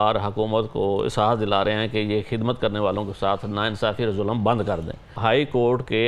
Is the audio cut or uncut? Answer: cut